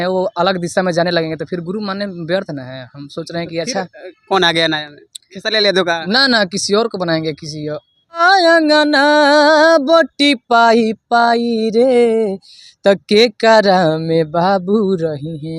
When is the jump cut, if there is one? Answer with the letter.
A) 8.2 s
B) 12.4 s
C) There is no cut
A